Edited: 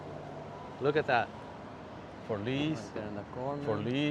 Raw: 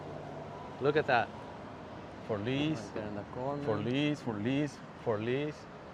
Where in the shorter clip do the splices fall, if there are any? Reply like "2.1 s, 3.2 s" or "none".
none